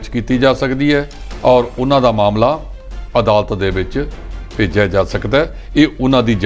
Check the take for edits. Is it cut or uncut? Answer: uncut